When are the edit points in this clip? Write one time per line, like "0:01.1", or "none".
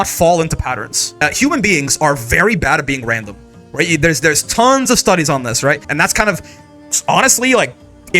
0:01.1
0:05.9